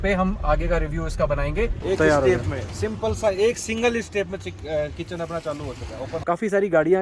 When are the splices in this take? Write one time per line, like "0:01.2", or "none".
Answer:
0:01.8
0:06.1

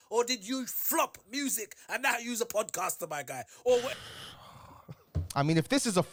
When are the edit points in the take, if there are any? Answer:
none

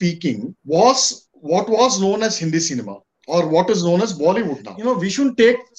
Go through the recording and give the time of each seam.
0:04.7

